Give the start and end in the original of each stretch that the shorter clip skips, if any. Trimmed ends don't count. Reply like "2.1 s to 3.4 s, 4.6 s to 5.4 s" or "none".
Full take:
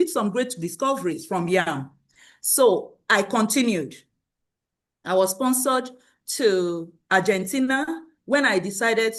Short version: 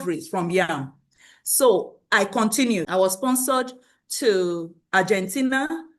3.8 s to 5.0 s